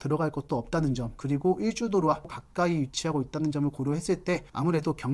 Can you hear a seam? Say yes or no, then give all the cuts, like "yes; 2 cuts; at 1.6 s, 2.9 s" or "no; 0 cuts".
yes; 1 cut; at 2.3 s